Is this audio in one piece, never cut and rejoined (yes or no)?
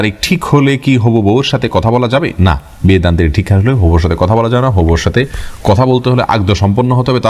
yes